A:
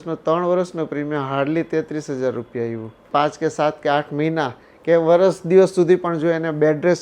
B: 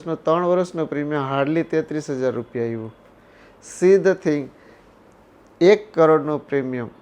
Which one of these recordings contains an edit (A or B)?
A